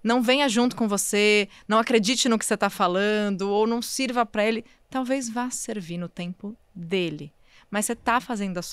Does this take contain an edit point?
no; 0 cuts

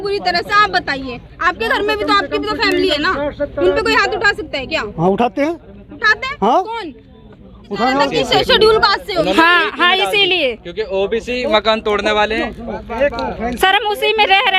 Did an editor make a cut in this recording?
yes; 1 cut; at 8.1 s

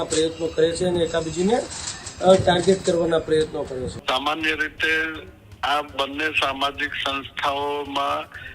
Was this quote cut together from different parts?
yes; 1 cut; at 3.9 s

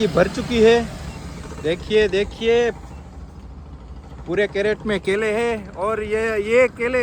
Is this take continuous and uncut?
yes; 0 cuts

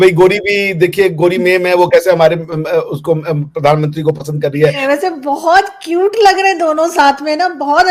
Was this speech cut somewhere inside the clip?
yes; 1 cut; at 4.8 s

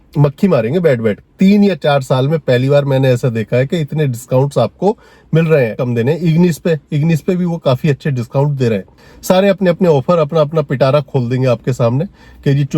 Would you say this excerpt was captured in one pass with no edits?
no; 3 cuts; at 1.2 s, 5.8 s, 9.0 s

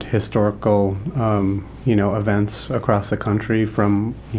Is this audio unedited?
yes; 0 cuts

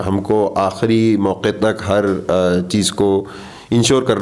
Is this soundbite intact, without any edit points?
yes; 0 cuts

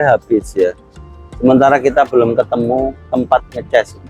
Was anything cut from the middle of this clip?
no; 0 cuts

